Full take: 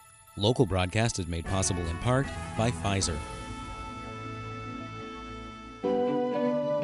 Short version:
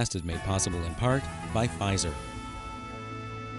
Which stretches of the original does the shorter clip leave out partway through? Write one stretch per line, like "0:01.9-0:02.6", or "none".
0:03.2-0:03.3